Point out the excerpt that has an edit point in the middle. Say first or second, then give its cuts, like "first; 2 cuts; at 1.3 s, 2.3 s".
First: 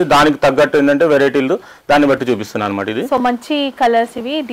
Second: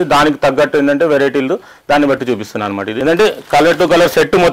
second; 1 cut; at 2.9 s